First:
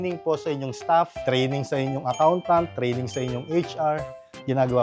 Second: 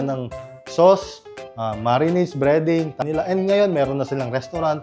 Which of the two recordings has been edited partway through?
second; 1 cut; at 3.0 s

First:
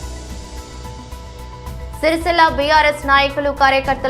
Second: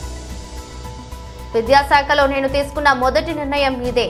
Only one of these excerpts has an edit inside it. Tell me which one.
first; 1 cut; at 1.5 s

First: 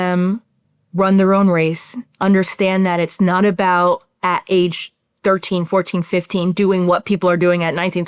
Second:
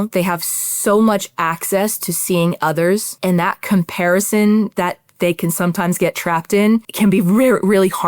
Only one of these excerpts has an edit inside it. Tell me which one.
second; 2 cuts; at 3.1 s, 6.9 s

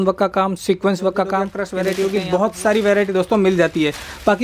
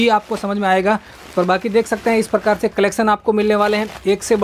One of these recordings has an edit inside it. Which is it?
first; 1 cut; at 1.6 s

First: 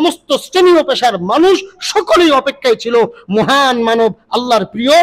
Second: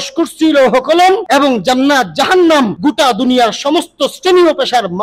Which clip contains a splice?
second; 2 cuts; at 1.2 s, 2.7 s

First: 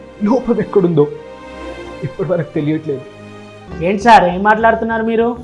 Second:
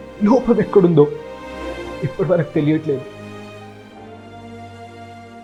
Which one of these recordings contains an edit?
first; 1 cut; at 3.6 s

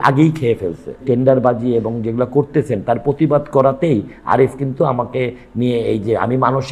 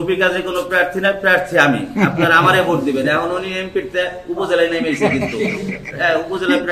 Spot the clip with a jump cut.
first; 1 cut; at 1.0 s

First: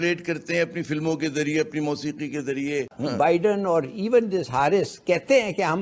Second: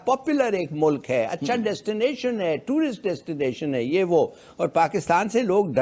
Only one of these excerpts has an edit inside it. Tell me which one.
first; 1 cut; at 3.0 s

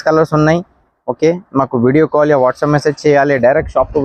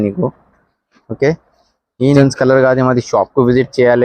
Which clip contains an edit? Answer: second; 1 cut; at 2.2 s

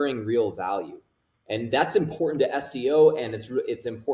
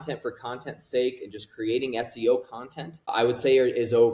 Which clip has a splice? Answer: second; 1 cut; at 3.1 s

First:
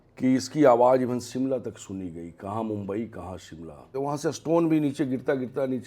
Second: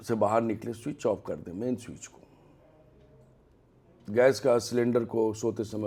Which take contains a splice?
first; 1 cut; at 3.9 s

